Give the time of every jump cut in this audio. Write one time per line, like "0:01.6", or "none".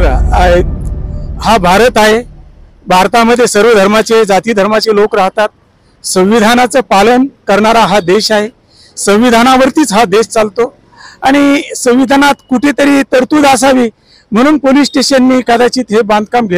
none